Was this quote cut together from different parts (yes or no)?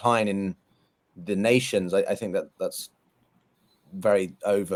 no